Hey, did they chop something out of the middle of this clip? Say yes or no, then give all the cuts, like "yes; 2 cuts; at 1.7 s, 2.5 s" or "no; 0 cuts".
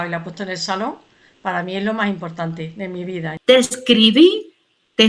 yes; 1 cut; at 3.2 s